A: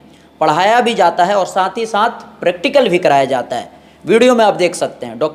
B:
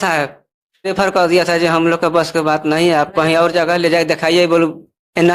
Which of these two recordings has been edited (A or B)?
B